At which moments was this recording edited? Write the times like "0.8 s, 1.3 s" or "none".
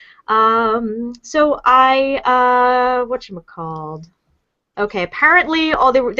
2.5 s